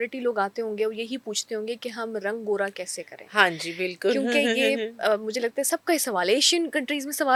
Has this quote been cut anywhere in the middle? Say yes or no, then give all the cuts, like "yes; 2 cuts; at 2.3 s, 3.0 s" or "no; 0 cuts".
no; 0 cuts